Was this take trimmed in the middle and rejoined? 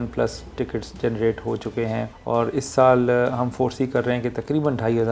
yes; 1 cut; at 2.1 s

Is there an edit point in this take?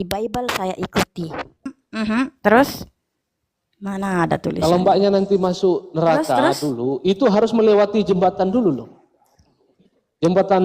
yes; 1 cut; at 1.8 s

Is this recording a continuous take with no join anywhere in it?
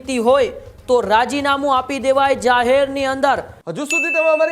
no; 1 cut; at 3.6 s

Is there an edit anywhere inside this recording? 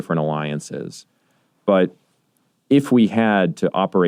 no; 0 cuts

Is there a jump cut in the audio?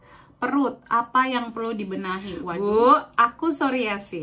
yes; 1 cut; at 2.4 s

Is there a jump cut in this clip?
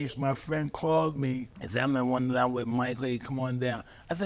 yes; 1 cut; at 1.6 s

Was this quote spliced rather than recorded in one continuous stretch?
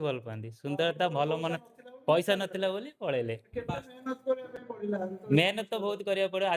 no; 0 cuts

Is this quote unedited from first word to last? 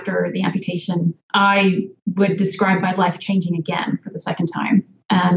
no; 1 cut; at 1.2 s

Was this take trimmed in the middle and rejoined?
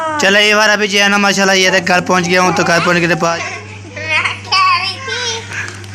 yes; 1 cut; at 3.4 s

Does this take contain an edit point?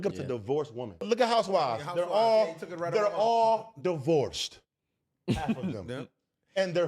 yes; 1 cut; at 1.0 s

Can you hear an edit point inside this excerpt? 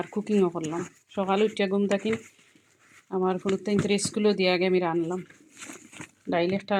no; 0 cuts

